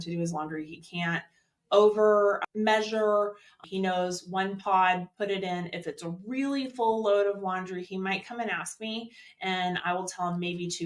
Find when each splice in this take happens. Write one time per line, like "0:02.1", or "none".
0:02.4
0:03.6

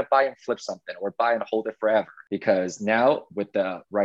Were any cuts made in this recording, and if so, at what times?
0:02.2

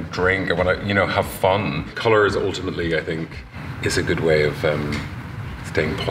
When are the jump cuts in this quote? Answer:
0:01.9
0:03.6

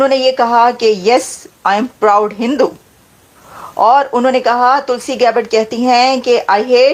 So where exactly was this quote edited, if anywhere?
none

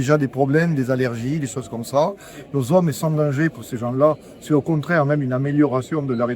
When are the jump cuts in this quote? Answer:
none

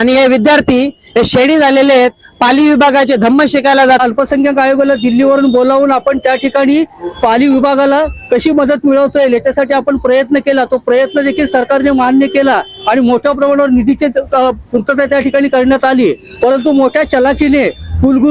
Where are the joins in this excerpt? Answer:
0:04.0

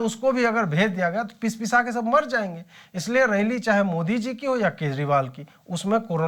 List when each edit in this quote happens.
none

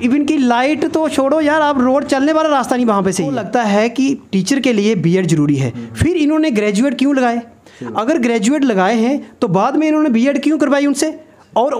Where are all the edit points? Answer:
0:03.4

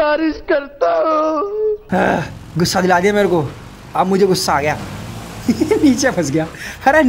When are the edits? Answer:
0:01.8

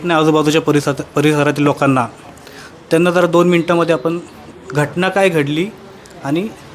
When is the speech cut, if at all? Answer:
none

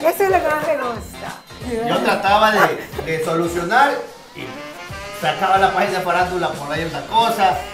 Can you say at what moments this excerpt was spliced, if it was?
0:01.7

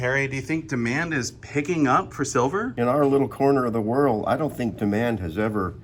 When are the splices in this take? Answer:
none

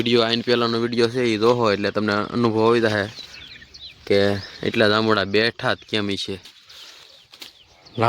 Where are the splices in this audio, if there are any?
0:06.5

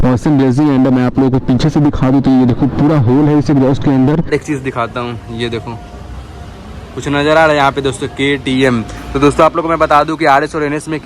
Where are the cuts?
0:04.3

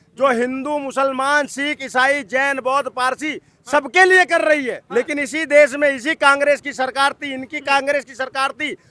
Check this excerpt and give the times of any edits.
0:04.8

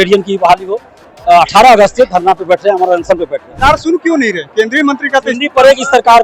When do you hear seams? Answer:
0:03.5

